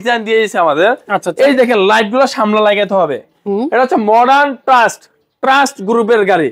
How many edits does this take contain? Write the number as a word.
zero